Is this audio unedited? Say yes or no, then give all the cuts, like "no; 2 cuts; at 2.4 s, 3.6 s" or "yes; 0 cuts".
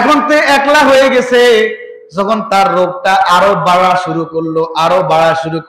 yes; 0 cuts